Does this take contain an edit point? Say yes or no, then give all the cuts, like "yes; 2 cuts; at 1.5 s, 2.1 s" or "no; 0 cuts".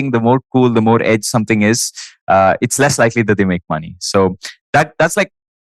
no; 0 cuts